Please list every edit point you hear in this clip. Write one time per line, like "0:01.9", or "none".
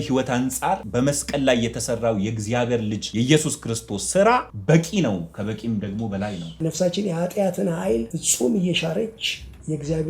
0:00.8
0:03.0
0:04.5
0:06.6
0:08.2